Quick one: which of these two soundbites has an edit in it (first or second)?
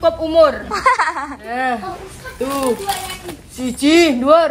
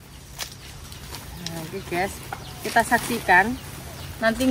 first